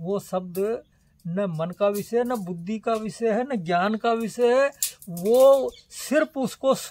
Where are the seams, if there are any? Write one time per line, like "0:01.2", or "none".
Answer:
none